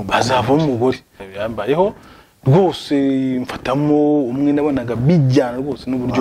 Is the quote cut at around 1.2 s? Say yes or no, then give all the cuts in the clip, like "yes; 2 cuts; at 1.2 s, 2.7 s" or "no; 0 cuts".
yes; 1 cut; at 1.2 s